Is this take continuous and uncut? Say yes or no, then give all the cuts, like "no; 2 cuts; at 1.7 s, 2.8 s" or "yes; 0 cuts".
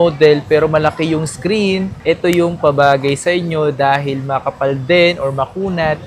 yes; 0 cuts